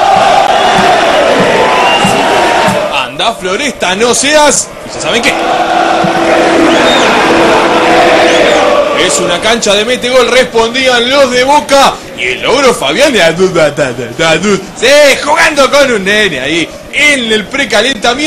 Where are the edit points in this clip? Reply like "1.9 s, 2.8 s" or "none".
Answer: none